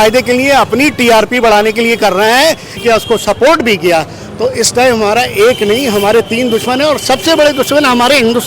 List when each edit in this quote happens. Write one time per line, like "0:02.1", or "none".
0:02.7